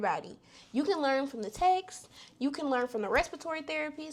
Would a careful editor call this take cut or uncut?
uncut